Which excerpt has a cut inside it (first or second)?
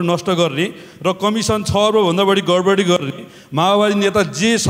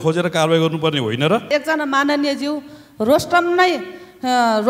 second